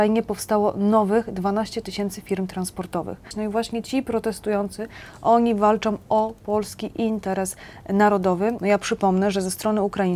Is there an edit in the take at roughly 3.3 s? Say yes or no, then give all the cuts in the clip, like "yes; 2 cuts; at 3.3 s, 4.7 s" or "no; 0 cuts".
yes; 2 cuts; at 3.3 s, 8.6 s